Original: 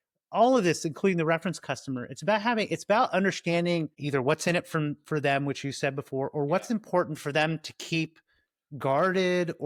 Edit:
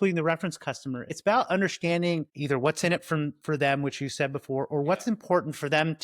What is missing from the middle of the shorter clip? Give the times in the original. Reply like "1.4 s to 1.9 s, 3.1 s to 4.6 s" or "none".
2.1 s to 2.8 s

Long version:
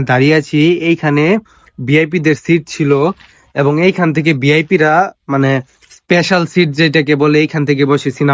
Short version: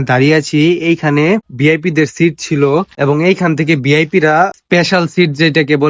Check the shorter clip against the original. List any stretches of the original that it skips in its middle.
1.5 s to 1.8 s, 3.2 s to 3.5 s, 5.2 s to 6.0 s

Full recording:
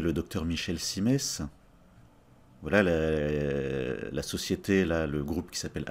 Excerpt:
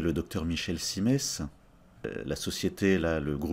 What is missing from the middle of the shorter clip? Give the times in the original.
2.1 s to 4.0 s

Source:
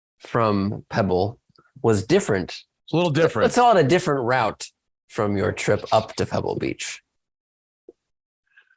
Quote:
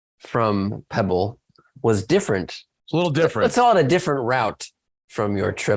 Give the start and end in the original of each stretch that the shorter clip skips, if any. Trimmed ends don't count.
none

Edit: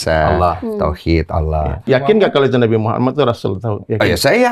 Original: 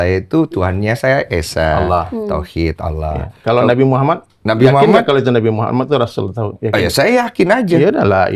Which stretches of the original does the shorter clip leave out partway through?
3.3 s to 4.6 s

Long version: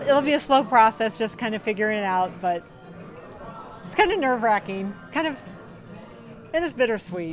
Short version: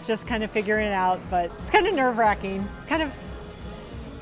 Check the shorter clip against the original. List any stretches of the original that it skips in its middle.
2.7 s to 3.8 s

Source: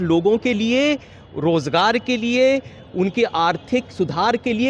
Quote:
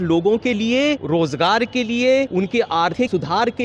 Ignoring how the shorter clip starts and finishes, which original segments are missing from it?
1.0 s to 1.3 s, 3.0 s to 3.5 s

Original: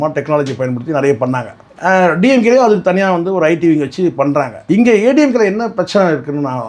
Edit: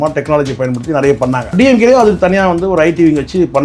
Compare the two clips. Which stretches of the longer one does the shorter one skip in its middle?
1.5 s to 2.2 s

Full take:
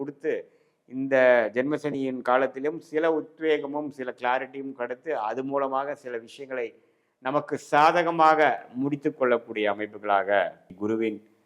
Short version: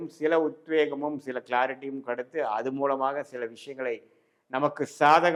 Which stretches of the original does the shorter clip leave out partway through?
none

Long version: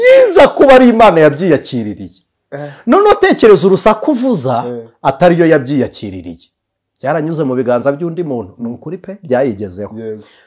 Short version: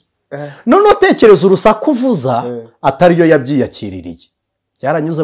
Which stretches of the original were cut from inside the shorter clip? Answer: none

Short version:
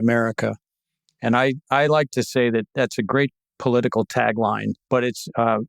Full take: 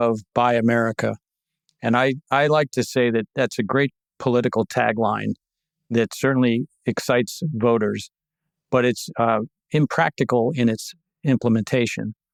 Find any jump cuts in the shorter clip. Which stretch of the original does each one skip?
5.3 s to 8.6 s

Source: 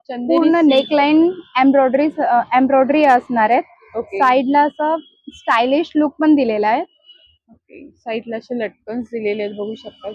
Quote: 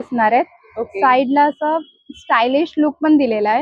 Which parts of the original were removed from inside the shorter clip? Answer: none

